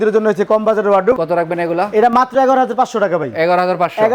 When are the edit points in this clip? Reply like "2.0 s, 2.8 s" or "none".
none